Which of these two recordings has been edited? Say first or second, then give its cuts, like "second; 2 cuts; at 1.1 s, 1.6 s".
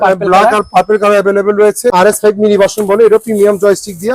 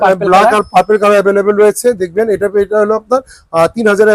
first; 1 cut; at 1.9 s